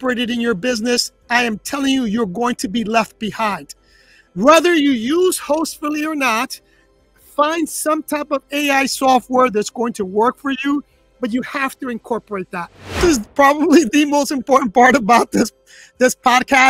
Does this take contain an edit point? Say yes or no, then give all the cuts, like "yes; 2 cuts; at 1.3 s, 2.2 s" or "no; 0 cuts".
yes; 1 cut; at 13.0 s